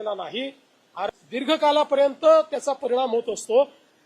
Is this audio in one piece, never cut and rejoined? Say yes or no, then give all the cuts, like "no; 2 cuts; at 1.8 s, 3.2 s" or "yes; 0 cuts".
no; 1 cut; at 1.1 s